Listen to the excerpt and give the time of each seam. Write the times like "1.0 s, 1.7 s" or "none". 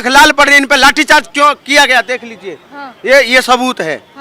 none